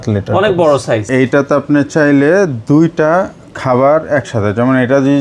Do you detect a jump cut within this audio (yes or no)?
yes